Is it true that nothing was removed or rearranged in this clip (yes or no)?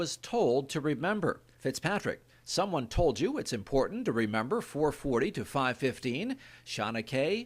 yes